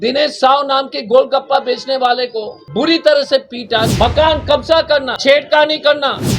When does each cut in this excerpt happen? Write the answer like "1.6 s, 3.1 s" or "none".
3.9 s